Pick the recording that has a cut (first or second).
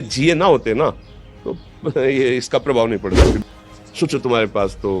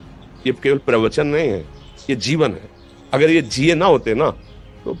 first